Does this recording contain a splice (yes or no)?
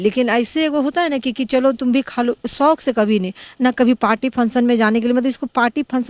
no